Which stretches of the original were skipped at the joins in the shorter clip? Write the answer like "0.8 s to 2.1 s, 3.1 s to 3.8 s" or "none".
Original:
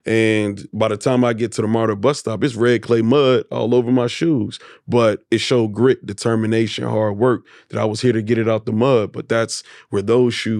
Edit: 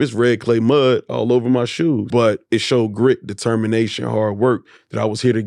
4.5 s to 4.8 s